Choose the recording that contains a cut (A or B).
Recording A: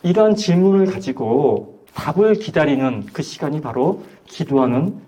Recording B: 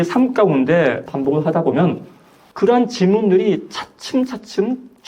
B